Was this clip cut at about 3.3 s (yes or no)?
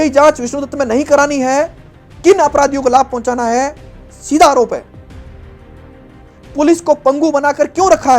no